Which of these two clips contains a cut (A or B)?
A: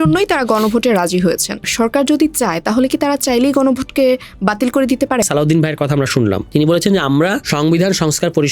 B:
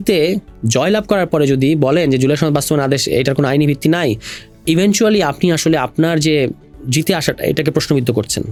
A